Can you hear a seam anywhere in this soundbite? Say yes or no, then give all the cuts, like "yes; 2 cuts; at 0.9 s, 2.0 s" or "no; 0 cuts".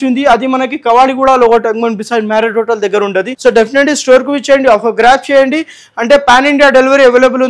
yes; 1 cut; at 3.3 s